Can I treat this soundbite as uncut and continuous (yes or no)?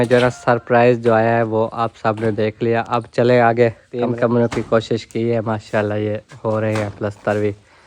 no